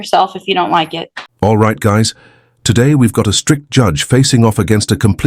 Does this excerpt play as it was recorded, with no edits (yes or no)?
no